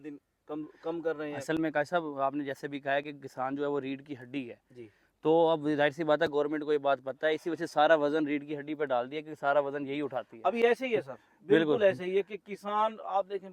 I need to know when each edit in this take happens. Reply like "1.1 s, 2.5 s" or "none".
none